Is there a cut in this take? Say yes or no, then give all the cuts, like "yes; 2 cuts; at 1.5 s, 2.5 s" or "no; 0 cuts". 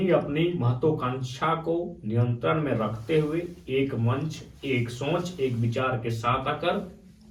no; 0 cuts